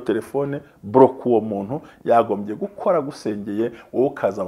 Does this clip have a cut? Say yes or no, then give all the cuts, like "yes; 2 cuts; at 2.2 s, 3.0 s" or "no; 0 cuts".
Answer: no; 0 cuts